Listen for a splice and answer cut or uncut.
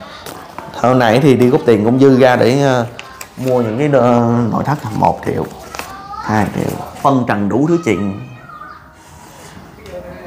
cut